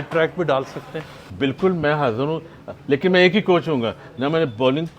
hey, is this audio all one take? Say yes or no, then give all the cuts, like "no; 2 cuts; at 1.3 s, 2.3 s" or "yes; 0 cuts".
no; 1 cut; at 1.2 s